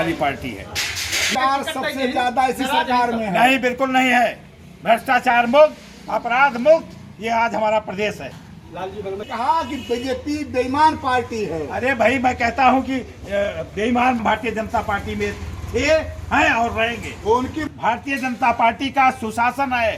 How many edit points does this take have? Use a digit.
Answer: 4